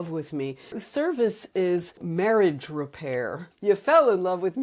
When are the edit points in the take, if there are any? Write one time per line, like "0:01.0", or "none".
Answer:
0:00.8
0:02.0
0:03.5